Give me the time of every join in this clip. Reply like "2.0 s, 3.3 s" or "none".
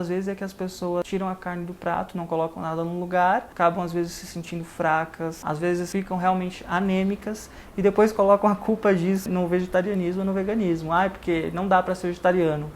1.0 s, 3.5 s, 5.7 s, 9.2 s